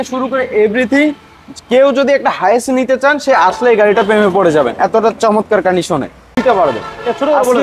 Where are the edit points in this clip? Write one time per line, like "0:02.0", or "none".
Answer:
0:06.4